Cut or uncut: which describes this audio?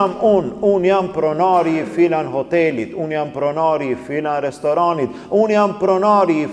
uncut